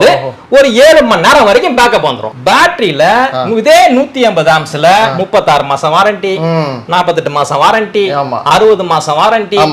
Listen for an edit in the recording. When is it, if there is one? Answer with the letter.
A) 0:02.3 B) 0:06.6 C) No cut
A